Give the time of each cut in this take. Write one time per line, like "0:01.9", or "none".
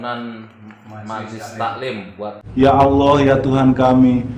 0:02.5